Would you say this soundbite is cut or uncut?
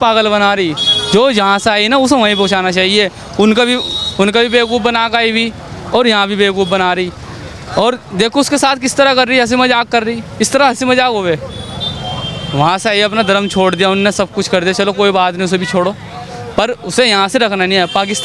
uncut